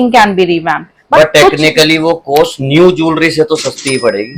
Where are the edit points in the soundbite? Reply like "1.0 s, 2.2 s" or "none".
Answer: 1.0 s